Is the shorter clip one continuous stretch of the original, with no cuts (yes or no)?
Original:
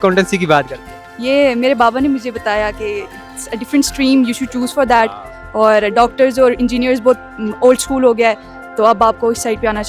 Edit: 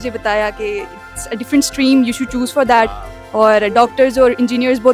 yes